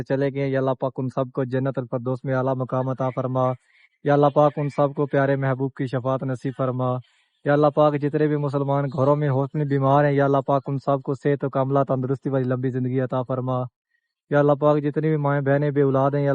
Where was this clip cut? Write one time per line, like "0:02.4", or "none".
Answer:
none